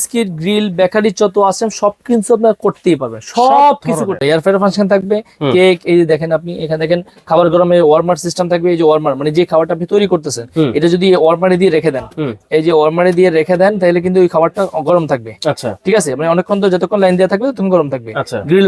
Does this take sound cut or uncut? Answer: cut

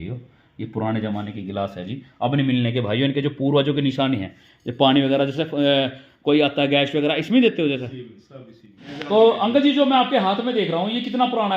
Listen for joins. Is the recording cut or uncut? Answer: cut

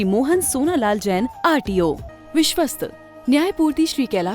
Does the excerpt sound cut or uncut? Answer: cut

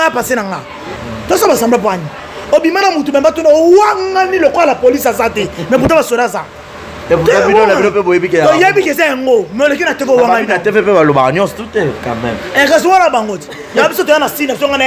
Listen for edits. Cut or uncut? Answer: cut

